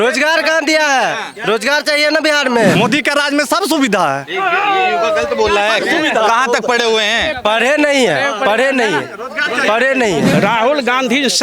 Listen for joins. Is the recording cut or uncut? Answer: cut